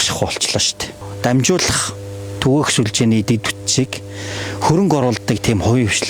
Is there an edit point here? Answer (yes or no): yes